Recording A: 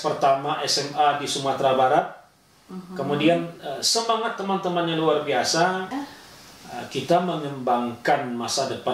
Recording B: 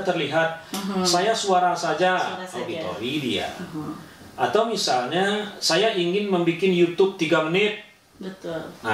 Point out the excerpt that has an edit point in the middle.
A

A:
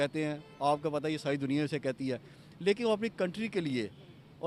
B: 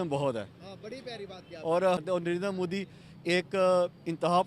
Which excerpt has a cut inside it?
B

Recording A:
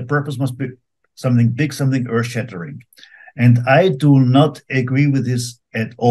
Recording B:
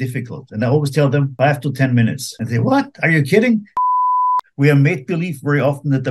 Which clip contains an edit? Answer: B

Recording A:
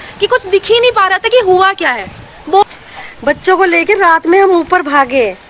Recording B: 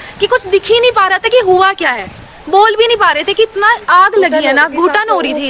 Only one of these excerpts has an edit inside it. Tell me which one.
A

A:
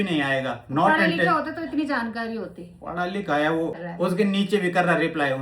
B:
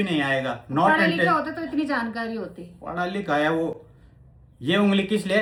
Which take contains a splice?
A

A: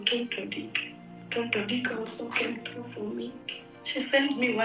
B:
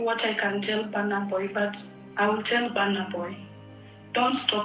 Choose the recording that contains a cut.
A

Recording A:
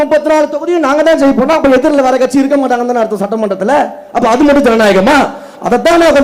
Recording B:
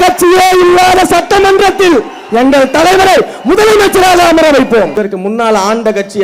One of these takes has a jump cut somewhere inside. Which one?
B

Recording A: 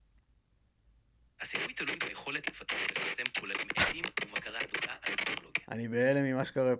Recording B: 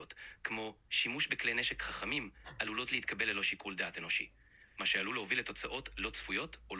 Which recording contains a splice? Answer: A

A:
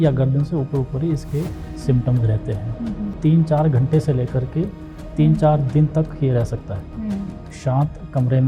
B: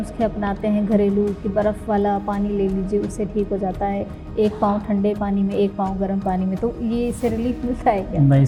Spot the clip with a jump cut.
A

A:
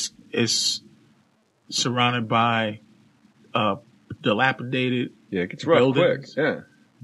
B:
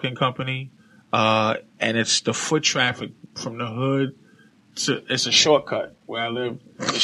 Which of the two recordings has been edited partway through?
B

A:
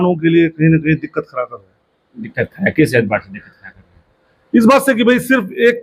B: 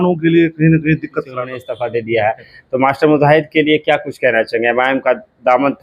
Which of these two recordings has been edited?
B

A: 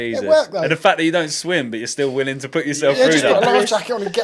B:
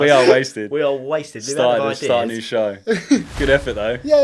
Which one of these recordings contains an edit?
B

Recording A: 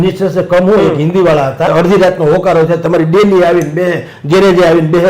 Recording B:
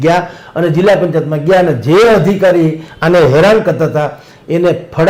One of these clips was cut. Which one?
A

